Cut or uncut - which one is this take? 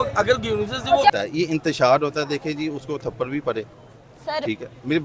cut